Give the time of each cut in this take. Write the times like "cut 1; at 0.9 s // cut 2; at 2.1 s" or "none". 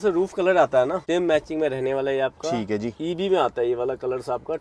cut 1; at 1.0 s